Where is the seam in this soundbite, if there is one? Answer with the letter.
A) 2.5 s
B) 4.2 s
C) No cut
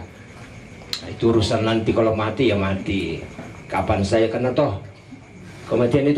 C